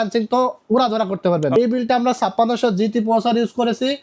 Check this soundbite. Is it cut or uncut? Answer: cut